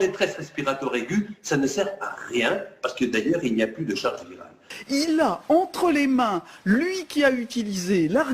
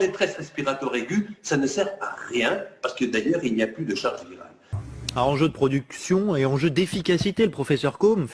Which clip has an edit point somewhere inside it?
first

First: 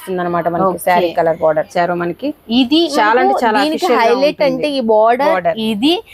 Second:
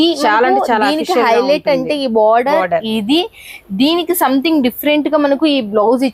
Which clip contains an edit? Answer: first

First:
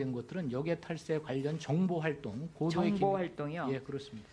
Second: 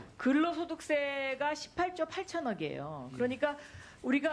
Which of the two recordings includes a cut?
first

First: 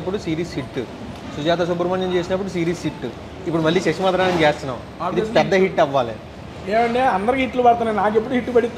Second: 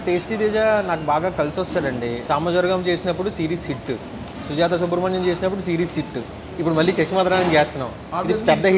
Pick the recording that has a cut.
second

